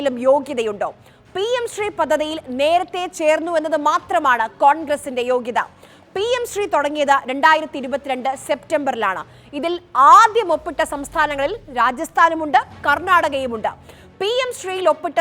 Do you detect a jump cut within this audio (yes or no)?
no